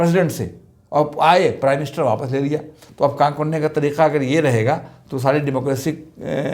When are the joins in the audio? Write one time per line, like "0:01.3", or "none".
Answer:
none